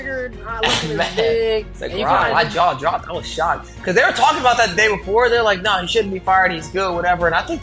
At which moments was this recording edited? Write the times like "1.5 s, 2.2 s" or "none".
2.3 s